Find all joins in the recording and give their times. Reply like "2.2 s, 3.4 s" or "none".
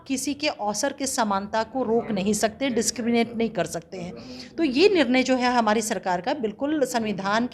none